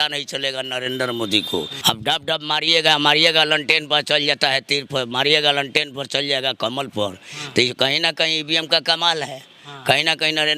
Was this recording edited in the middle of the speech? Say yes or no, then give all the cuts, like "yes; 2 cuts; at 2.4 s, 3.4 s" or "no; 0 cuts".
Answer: yes; 1 cut; at 1.7 s